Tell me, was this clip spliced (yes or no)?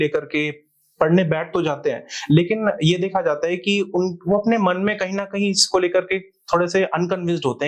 no